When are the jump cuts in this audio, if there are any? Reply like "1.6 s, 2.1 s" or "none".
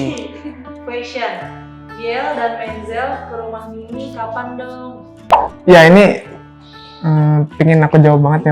none